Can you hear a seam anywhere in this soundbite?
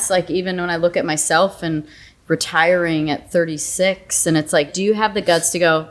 yes; 1 cut; at 4.7 s

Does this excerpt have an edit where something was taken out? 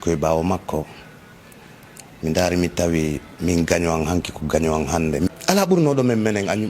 yes; 1 cut; at 5.3 s

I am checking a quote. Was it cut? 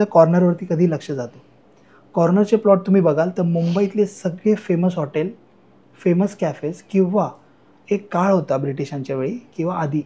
no; 0 cuts

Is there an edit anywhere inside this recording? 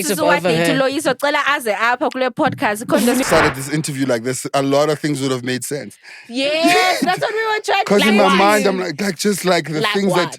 yes; 1 cut; at 3.2 s

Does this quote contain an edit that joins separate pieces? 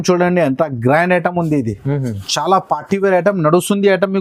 no; 0 cuts

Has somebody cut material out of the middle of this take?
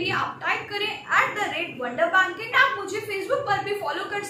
yes; 1 cut; at 2.5 s

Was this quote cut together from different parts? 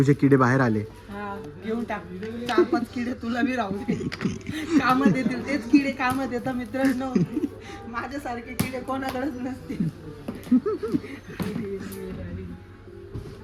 no; 0 cuts

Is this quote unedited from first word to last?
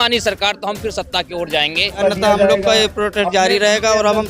no; 1 cut; at 2.0 s

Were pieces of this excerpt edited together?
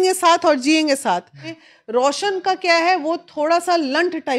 yes; 1 cut; at 1.5 s

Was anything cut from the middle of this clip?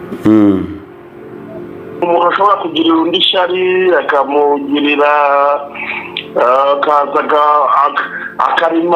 yes; 1 cut; at 2.0 s

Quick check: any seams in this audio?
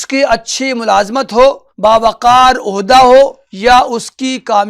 yes; 2 cuts; at 1.7 s, 3.5 s

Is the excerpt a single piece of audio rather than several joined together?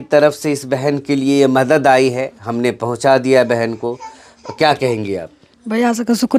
yes; 0 cuts

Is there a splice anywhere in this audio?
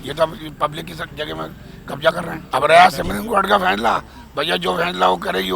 yes; 1 cut; at 2.3 s

